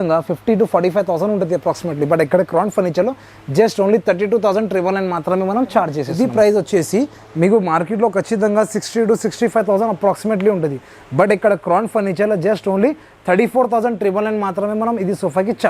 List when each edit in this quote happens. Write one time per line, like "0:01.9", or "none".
0:06.0